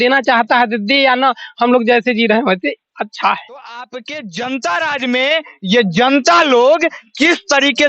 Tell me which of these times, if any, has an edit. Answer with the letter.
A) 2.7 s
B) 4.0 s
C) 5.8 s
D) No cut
B